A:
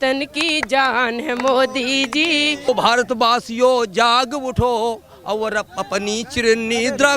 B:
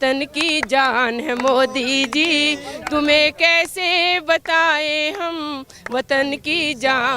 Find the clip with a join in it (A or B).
A